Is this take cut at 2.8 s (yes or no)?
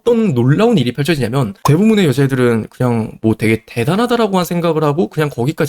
no